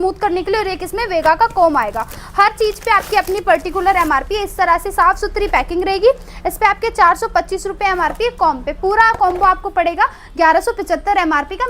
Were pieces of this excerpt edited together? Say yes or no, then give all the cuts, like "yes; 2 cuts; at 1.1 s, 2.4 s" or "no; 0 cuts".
no; 0 cuts